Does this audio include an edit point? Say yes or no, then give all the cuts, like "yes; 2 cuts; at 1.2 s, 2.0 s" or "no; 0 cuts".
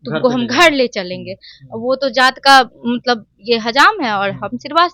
yes; 1 cut; at 1.4 s